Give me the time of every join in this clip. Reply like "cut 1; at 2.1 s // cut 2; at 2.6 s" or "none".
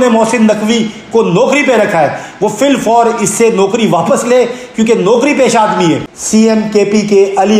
cut 1; at 6.1 s

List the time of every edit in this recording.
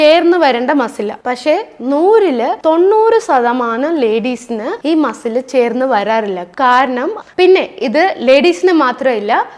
cut 1; at 7.2 s

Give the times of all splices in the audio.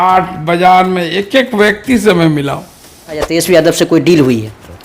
cut 1; at 3.3 s

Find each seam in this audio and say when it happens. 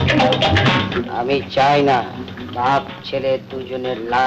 cut 1; at 2.4 s

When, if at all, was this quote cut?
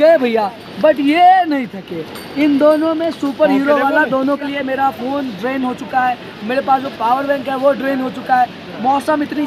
cut 1; at 4.4 s

